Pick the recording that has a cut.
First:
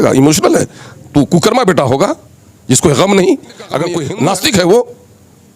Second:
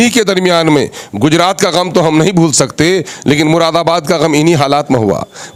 first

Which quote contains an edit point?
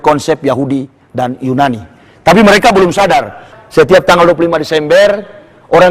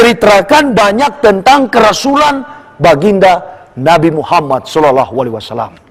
first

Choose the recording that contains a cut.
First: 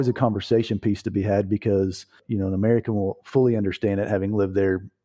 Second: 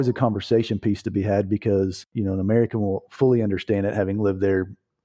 second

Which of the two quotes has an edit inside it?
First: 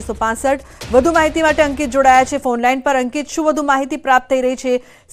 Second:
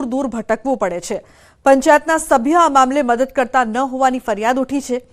second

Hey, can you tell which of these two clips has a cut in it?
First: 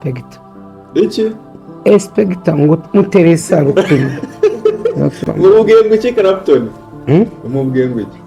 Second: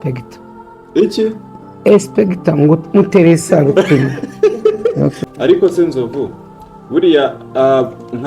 second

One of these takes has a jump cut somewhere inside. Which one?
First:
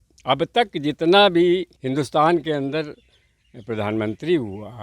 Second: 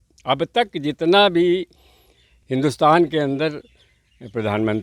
first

